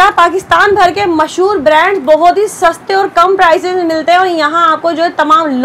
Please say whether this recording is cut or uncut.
uncut